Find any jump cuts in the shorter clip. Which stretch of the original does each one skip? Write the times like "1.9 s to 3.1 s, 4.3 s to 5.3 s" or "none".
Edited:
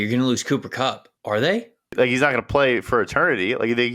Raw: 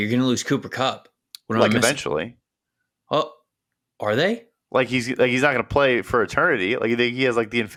1.1 s to 3.8 s, 4.6 s to 5.1 s